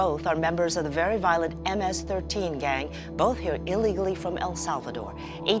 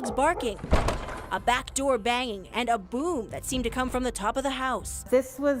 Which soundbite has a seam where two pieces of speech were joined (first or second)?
second